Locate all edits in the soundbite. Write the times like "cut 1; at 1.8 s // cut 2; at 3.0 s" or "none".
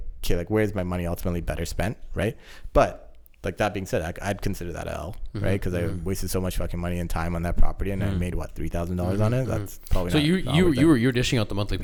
none